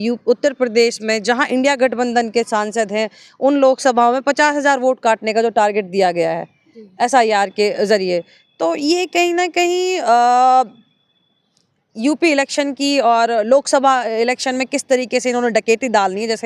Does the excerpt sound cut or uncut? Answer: uncut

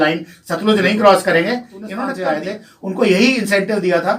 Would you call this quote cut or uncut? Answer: cut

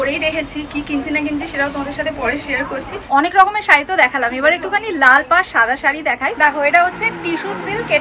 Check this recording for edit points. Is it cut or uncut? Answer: cut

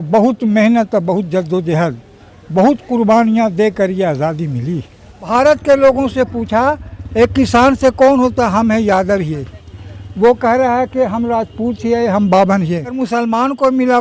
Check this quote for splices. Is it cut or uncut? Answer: cut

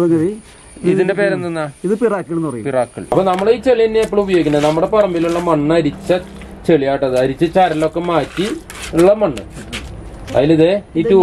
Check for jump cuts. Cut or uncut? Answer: cut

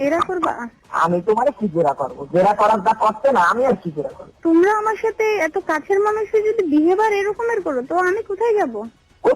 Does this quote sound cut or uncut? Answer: cut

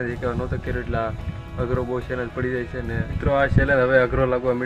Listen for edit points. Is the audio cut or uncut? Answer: cut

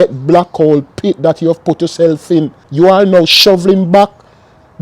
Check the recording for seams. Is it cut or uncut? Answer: cut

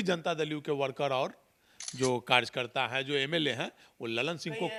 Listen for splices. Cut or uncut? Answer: uncut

